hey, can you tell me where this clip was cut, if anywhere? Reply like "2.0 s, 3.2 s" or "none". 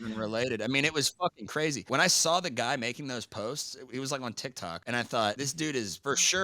1.8 s, 4.8 s, 5.5 s

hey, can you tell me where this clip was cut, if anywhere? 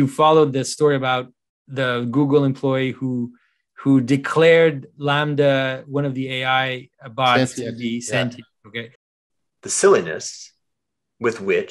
8.9 s

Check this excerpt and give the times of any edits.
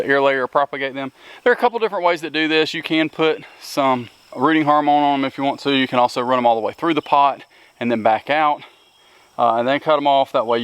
4.3 s

